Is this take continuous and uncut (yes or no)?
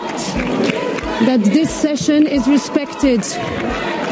no